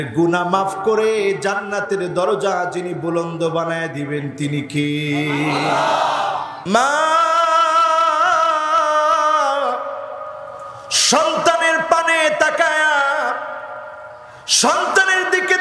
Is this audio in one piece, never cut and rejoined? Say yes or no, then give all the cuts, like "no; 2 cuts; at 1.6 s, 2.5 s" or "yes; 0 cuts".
no; 1 cut; at 6.5 s